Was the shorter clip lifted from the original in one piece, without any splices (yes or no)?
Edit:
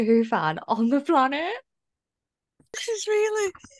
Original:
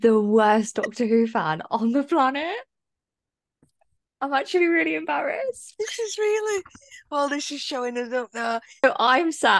no